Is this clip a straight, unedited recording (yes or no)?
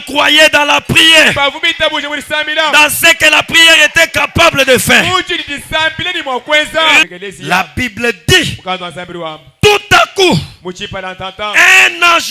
no